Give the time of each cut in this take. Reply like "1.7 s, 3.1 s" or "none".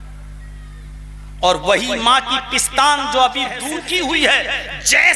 3.6 s